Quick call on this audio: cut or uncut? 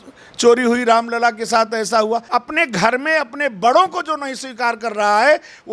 cut